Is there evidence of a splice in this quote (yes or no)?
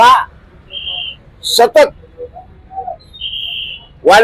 no